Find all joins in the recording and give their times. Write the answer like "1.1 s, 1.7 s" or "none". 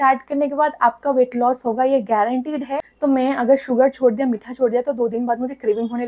2.8 s